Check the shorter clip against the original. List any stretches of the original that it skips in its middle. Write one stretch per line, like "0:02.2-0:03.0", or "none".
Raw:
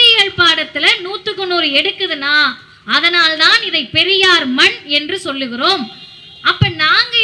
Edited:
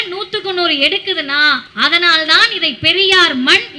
0:02.6-0:02.8